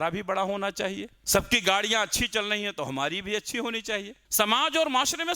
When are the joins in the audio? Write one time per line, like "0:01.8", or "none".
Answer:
0:01.1
0:04.2

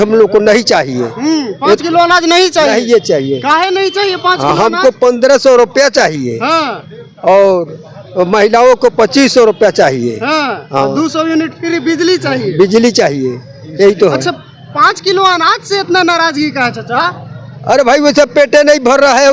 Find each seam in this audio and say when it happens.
none

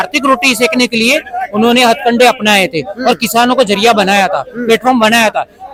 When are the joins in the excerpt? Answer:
none

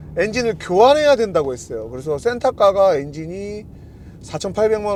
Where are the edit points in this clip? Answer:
none

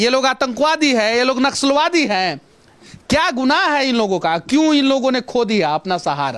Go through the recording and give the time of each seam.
none

